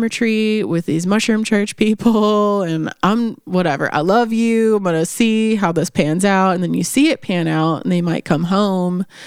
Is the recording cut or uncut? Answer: uncut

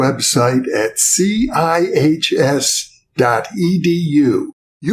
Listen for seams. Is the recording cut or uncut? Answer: uncut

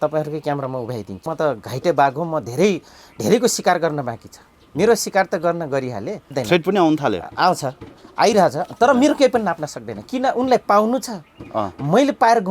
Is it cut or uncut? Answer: cut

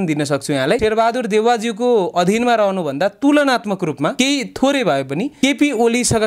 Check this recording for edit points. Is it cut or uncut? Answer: cut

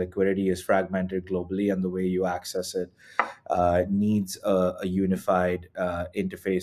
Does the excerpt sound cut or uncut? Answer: uncut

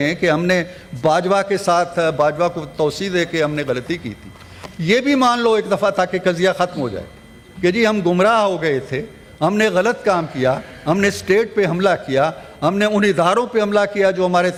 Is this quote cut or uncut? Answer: uncut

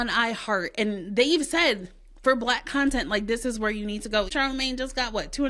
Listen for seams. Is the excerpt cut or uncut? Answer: cut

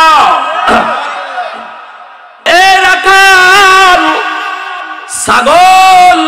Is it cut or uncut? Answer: cut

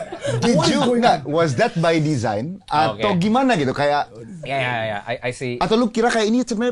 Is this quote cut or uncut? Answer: uncut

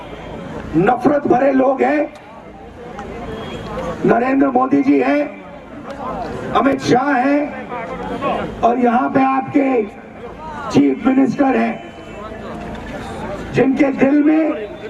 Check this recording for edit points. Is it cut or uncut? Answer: uncut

